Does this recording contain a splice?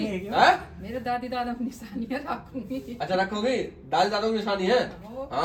no; 0 cuts

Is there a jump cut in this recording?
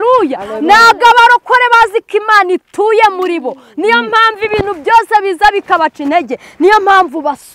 no; 0 cuts

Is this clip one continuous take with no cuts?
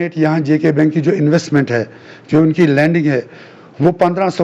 yes; 0 cuts

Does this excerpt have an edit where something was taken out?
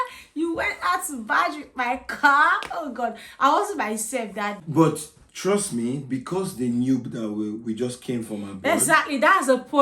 yes; 1 cut; at 4.6 s

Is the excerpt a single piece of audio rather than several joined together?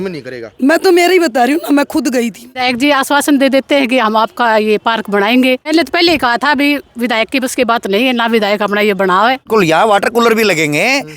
no; 3 cuts; at 2.4 s, 5.6 s, 9.4 s

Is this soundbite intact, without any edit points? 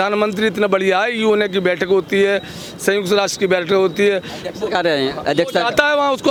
yes; 0 cuts

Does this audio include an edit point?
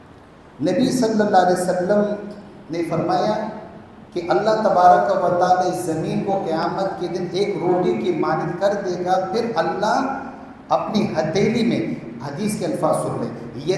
no; 0 cuts

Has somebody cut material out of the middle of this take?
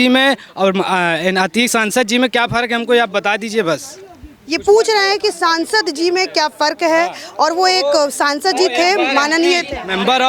no; 0 cuts

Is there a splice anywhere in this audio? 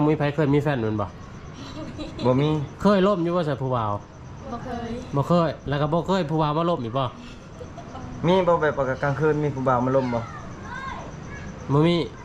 no; 0 cuts

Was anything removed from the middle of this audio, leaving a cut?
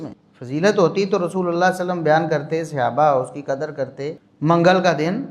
yes; 1 cut; at 4.3 s

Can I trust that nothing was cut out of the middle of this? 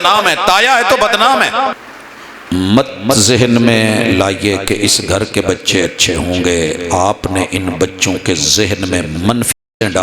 no; 1 cut; at 1.8 s

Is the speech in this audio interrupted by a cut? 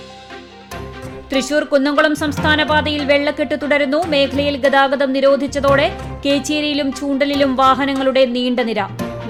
no; 0 cuts

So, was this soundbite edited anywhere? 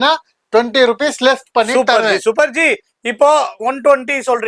no; 0 cuts

